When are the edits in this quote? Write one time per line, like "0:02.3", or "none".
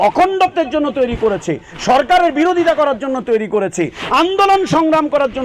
none